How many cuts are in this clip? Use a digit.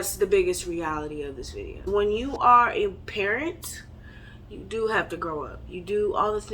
1